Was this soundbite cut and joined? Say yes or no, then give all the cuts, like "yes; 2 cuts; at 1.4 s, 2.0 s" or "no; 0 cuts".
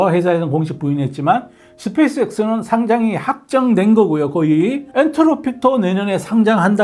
yes; 1 cut; at 4.9 s